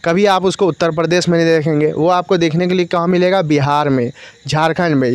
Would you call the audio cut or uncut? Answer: uncut